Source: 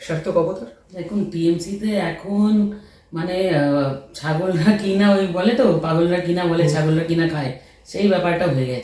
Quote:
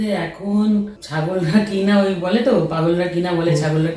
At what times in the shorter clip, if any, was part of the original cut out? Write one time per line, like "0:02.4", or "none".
0:01.0

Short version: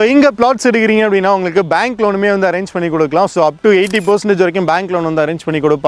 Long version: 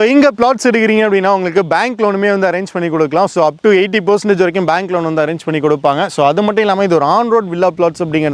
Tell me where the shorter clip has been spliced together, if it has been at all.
none

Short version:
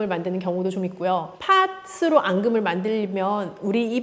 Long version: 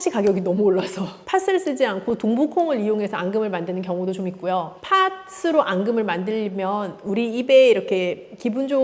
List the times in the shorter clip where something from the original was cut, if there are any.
none

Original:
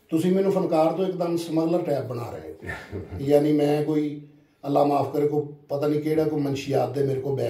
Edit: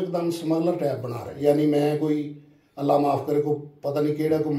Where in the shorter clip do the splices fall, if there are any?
0:01.3

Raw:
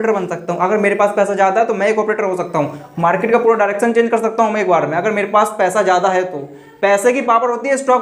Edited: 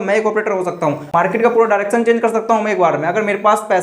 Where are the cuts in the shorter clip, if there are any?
0:01.0

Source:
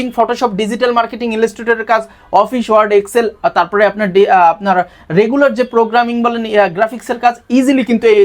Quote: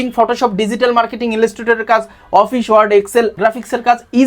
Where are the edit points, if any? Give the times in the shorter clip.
0:03.4

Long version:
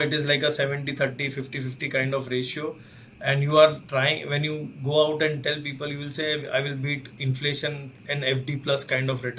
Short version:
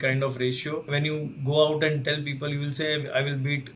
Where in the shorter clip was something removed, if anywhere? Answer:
0:00.9

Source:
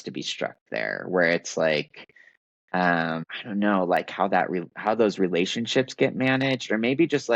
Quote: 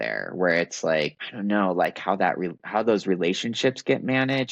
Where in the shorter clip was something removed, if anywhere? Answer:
0:01.3

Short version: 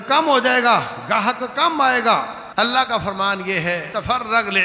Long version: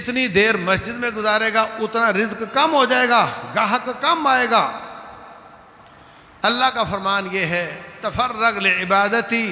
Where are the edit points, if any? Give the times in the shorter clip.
0:02.4
0:03.9

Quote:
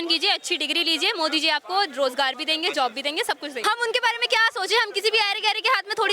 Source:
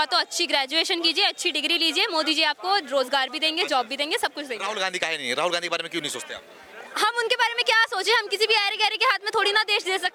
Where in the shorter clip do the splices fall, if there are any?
0:03.6

